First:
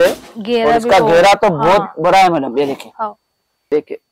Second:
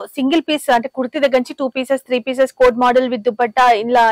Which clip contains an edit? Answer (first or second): first